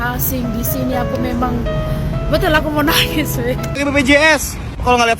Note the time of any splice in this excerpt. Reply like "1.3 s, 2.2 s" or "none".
3.7 s